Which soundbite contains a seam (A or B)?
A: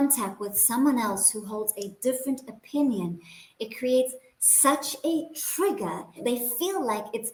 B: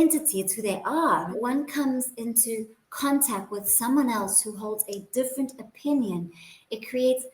B